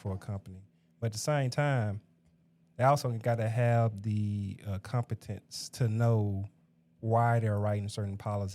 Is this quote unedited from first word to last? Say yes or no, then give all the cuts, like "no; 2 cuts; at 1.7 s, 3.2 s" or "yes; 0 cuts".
yes; 0 cuts